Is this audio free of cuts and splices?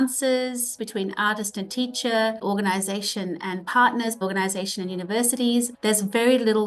no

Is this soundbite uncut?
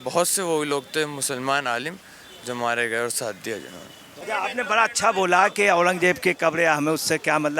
no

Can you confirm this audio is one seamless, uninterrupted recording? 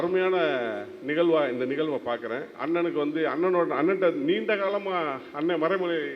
no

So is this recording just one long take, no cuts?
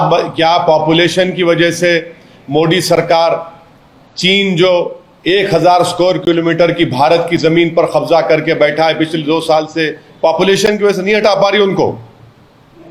yes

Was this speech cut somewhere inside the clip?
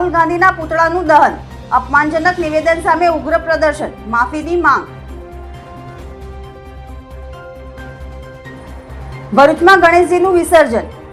yes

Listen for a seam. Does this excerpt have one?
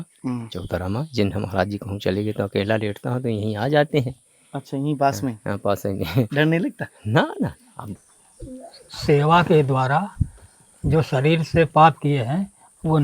yes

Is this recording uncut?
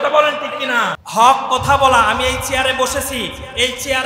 no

